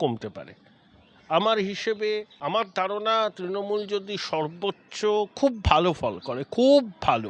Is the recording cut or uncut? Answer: cut